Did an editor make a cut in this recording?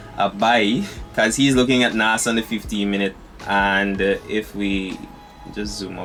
no; 0 cuts

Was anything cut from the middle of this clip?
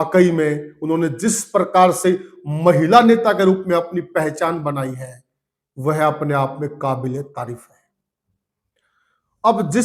no; 0 cuts

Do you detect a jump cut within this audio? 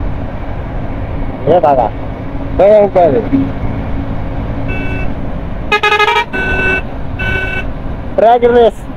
no; 0 cuts

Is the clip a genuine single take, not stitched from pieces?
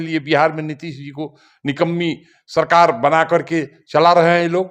yes; 0 cuts

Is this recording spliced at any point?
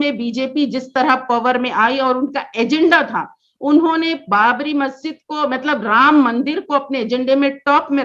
no; 0 cuts

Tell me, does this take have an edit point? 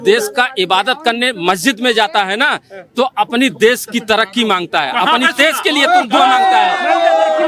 no; 0 cuts

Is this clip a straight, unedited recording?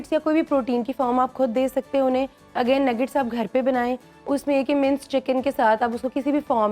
yes; 0 cuts

